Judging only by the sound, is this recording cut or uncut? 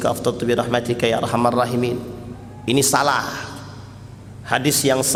uncut